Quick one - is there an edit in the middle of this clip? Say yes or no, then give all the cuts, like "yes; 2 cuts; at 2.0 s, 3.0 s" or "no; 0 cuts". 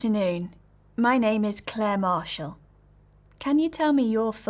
no; 0 cuts